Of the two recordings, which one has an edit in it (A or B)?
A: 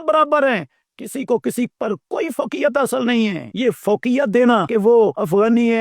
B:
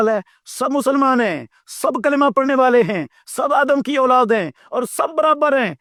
A